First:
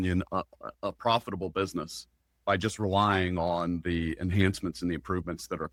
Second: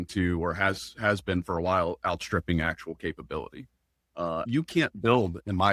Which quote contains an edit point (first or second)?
second